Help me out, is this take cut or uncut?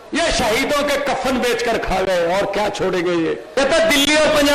cut